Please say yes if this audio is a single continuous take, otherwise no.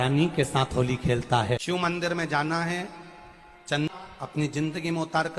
no